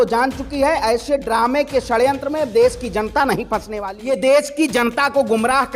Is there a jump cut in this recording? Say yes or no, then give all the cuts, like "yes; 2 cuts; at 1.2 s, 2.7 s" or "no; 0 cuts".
yes; 1 cut; at 3.9 s